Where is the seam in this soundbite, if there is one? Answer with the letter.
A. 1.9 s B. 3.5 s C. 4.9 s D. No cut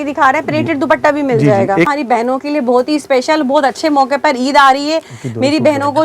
A